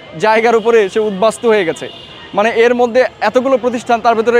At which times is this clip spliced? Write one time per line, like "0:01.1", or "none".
none